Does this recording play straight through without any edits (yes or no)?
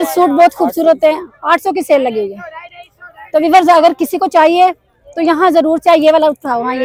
yes